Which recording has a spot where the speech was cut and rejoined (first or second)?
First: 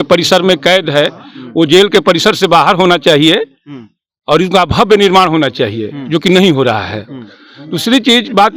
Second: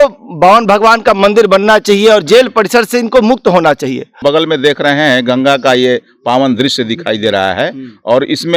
second